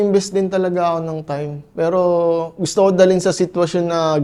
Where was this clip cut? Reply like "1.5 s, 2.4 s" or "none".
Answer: none